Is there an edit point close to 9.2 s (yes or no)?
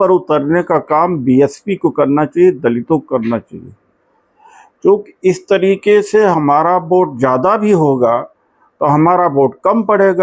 no